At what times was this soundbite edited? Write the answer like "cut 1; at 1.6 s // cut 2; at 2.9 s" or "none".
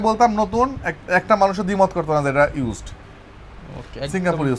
none